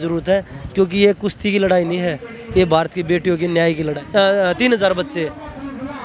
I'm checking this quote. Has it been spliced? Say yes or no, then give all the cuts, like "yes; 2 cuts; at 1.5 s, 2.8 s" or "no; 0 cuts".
yes; 1 cut; at 4.0 s